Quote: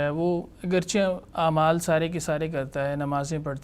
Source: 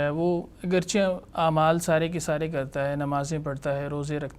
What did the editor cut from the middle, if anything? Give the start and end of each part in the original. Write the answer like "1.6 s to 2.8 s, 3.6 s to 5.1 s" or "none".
none

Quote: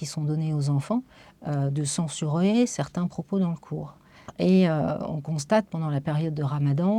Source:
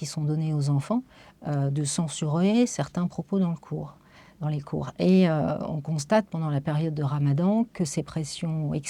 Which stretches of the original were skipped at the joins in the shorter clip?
4.3 s to 4.9 s

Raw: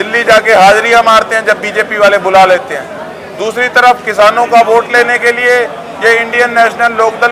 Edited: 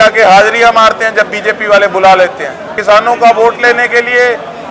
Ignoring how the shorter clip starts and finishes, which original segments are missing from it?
3.1 s to 4.1 s

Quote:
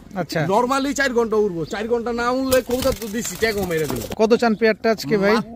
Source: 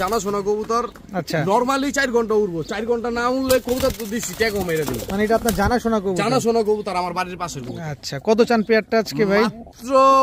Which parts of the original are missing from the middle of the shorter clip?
5.1 s to 8.1 s

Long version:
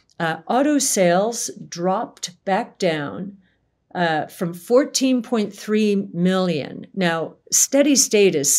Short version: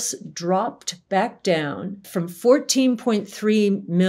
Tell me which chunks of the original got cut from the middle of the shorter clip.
3.4 s to 4.3 s

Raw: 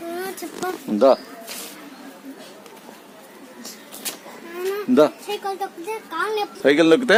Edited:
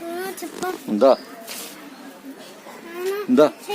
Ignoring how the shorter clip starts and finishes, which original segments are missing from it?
2.6 s to 4.2 s

